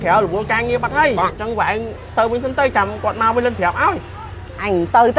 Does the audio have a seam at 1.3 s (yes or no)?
yes